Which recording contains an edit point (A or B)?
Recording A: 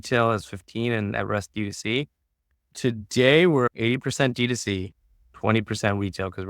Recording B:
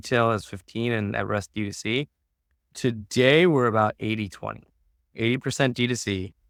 A